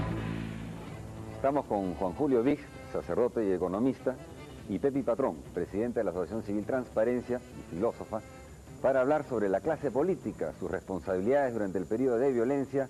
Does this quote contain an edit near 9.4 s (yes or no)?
no